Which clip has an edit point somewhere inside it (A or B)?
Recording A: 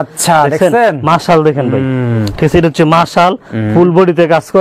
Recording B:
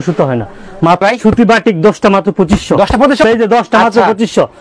B